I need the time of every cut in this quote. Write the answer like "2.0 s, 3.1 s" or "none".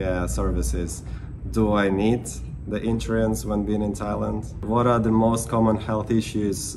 4.6 s

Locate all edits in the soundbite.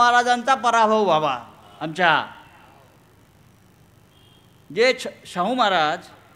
none

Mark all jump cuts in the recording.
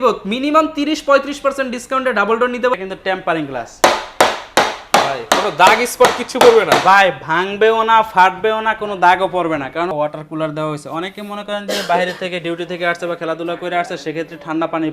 2.7 s, 9.9 s

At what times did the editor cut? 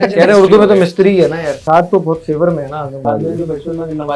1.5 s, 3.1 s

